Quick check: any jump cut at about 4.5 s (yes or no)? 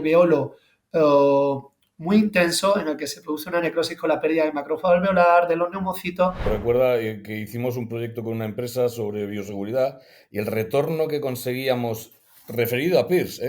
no